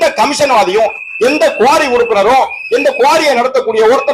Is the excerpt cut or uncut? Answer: uncut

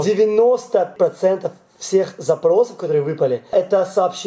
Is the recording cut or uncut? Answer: uncut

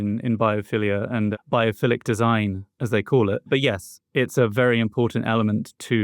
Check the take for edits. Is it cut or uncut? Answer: cut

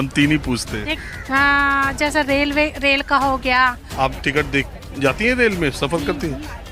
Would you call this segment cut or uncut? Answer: cut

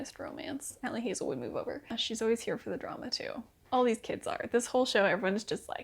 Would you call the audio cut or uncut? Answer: cut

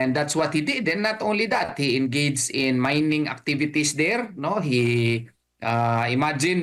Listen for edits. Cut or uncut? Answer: uncut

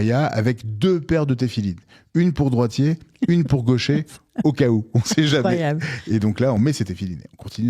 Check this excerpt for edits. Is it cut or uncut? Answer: cut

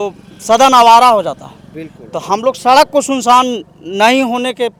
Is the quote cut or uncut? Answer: uncut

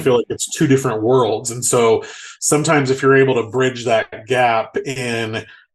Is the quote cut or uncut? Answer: uncut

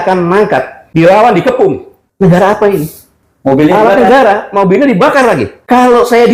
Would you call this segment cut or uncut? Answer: uncut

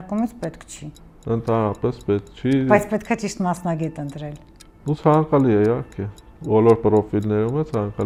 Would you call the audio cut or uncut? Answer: uncut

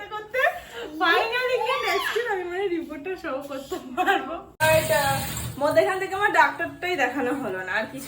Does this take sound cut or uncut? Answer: cut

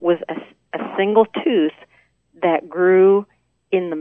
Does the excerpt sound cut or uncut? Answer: uncut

